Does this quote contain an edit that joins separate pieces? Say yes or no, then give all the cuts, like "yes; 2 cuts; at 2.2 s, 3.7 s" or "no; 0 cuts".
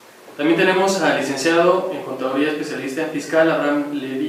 no; 0 cuts